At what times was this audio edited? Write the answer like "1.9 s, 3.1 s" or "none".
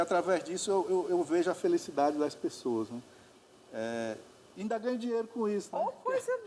none